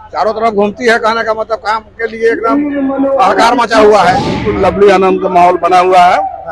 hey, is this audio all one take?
no; 1 cut; at 4.4 s

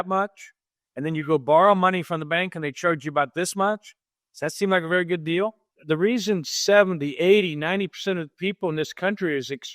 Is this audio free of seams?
no; 1 cut; at 5.7 s

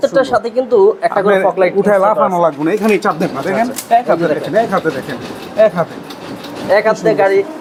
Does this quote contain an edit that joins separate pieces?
no; 0 cuts

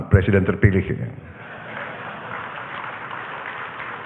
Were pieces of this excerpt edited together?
no; 0 cuts

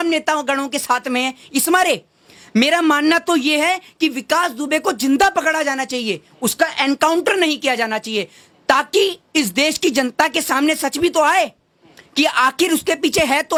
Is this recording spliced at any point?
no; 0 cuts

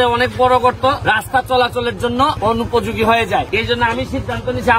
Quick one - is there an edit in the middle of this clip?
yes; 3 cuts; at 1.0 s, 2.4 s, 3.5 s

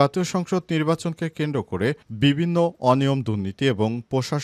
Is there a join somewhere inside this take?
no; 0 cuts

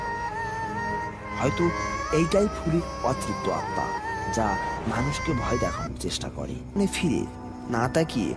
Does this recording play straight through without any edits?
no; 1 cut; at 6.8 s

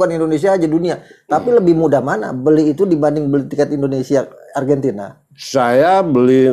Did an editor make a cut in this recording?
no; 0 cuts

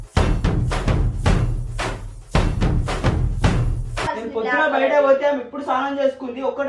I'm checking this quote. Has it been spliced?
yes; 1 cut; at 4.1 s

